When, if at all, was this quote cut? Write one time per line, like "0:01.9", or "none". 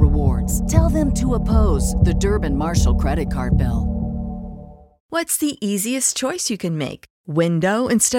0:05.1